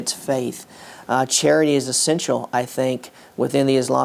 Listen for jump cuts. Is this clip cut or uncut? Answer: uncut